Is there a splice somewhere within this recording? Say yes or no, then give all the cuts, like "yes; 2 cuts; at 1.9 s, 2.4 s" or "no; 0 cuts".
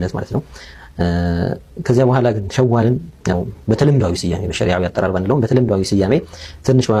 no; 0 cuts